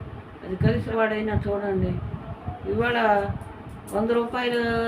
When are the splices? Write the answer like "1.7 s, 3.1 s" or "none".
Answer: 0.9 s